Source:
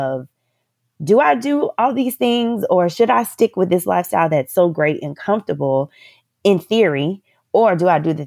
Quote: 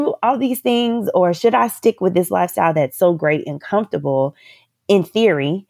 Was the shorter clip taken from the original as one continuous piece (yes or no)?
yes